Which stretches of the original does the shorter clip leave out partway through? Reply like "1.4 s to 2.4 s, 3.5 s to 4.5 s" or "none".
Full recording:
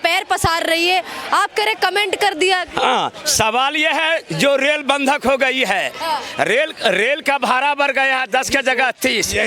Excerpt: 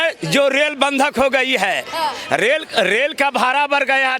none